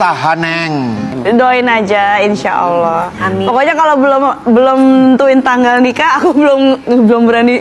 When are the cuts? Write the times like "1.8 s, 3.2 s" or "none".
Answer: 1.1 s